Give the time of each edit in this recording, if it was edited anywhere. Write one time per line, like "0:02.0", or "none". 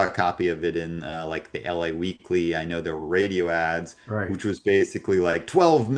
none